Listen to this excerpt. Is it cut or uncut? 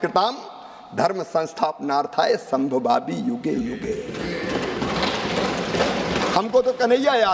uncut